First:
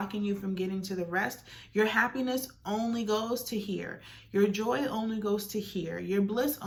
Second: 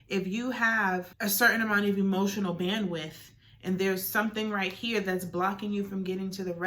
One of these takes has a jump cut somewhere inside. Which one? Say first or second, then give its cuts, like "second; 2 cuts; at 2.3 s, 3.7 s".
second; 1 cut; at 1.1 s